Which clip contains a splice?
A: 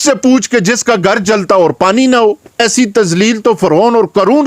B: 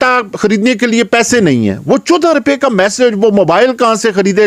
A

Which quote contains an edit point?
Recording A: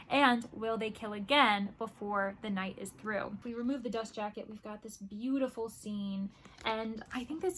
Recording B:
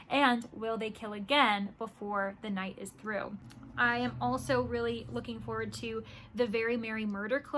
A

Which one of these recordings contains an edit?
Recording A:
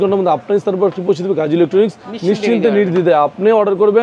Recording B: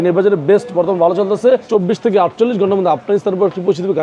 B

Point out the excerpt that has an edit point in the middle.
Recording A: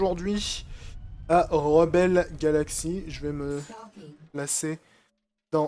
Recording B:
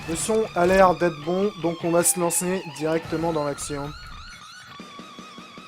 A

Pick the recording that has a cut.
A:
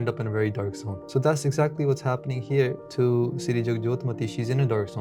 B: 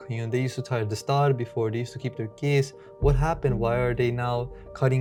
A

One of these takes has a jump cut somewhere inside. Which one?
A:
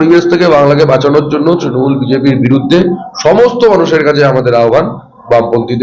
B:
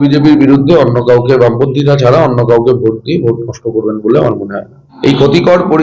B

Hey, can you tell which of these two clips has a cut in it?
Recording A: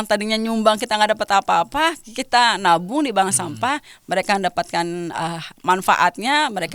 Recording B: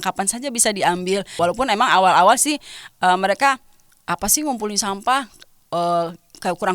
B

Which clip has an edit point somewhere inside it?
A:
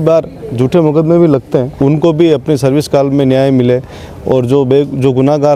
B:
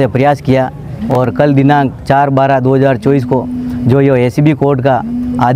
A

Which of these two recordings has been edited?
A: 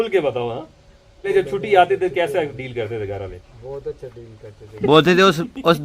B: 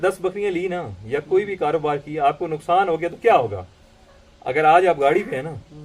A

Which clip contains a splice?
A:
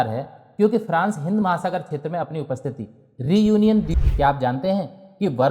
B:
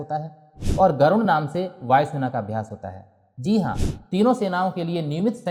A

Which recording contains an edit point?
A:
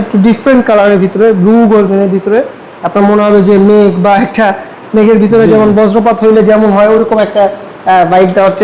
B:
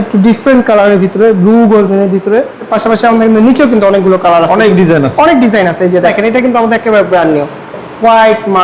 B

